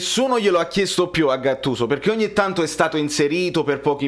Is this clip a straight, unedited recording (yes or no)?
yes